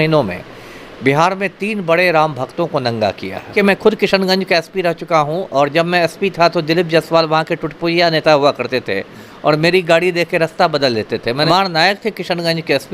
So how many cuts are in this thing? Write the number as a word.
two